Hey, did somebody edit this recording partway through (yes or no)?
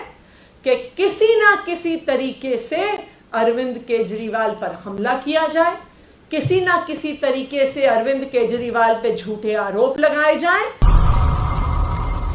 yes